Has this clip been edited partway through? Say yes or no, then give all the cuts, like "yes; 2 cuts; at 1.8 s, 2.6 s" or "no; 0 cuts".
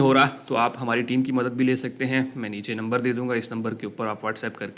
no; 0 cuts